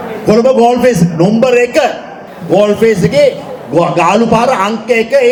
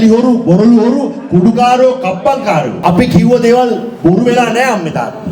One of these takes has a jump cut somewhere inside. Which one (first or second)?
second